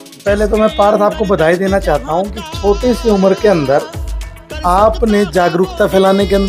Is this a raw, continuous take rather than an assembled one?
yes; 0 cuts

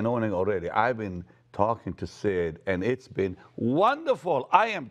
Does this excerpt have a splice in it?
no; 0 cuts

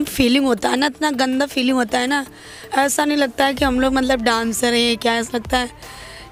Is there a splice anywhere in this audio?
no; 0 cuts

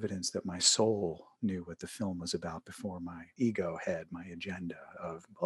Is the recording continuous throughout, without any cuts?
no; 1 cut; at 3.2 s

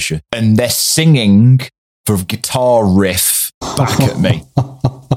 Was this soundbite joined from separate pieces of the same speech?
yes; 1 cut; at 3.6 s

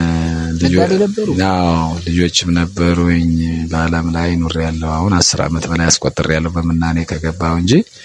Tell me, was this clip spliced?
no; 0 cuts

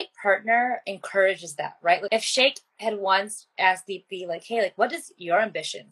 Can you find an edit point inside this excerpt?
yes; 2 cuts; at 0.9 s, 2.0 s

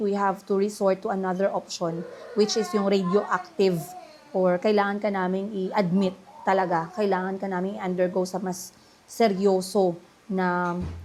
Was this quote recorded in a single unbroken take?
yes; 0 cuts

